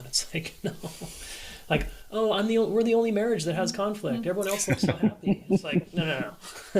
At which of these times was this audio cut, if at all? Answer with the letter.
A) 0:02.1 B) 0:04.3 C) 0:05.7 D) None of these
D